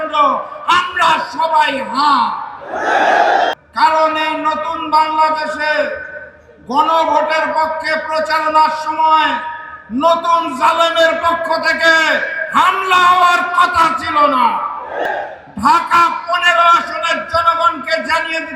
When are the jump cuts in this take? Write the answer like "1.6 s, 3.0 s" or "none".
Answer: 3.5 s, 15.0 s